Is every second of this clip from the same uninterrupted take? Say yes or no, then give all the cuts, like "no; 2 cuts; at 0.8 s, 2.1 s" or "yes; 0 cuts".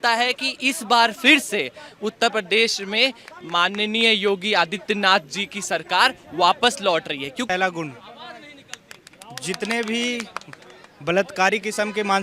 no; 1 cut; at 7.5 s